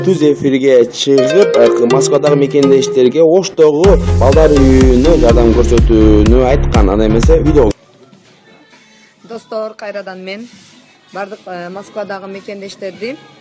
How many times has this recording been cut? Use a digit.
1